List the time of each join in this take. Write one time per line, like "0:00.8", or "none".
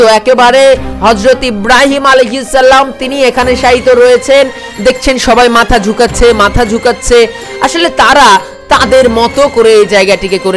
0:04.6

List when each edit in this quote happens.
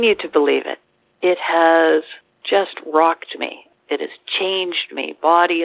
0:01.0

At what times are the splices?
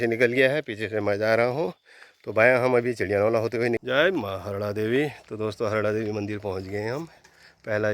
0:03.8

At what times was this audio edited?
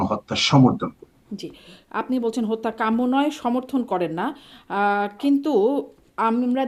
none

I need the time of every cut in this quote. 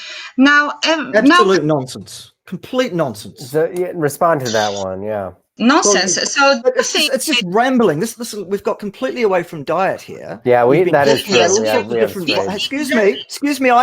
0:05.4

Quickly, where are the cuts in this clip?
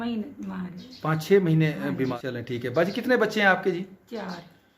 0:02.1

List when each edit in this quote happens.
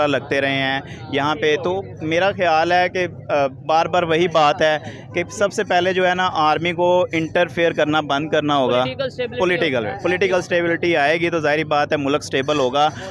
none

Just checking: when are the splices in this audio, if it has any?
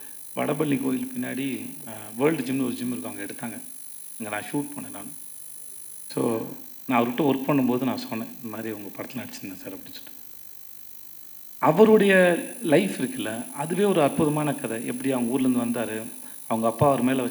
none

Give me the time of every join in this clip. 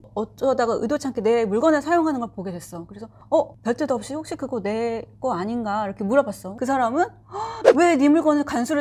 none

